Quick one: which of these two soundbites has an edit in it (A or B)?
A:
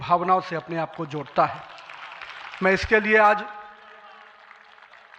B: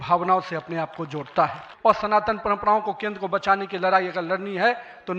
B